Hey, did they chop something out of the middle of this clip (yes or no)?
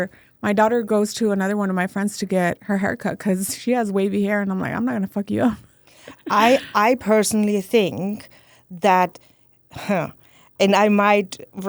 no